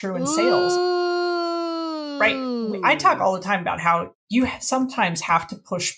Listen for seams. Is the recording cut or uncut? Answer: cut